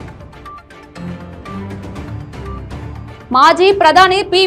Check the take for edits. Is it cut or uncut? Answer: cut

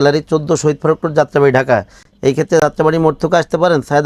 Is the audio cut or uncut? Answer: uncut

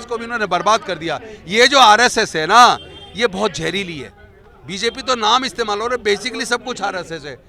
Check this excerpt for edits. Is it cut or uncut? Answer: uncut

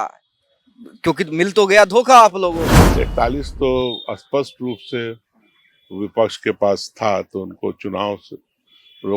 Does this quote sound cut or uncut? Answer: cut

